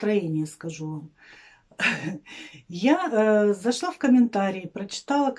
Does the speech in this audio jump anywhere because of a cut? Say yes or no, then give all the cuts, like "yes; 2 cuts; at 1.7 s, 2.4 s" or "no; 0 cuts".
no; 0 cuts